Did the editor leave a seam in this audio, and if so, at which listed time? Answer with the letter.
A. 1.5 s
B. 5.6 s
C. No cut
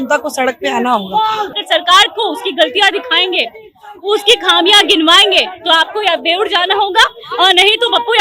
A